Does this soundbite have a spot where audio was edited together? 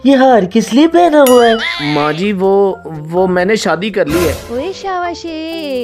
yes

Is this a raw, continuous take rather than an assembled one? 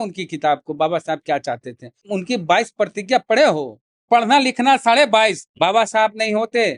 no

